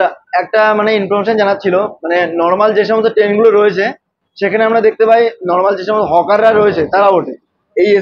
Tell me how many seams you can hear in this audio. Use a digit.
0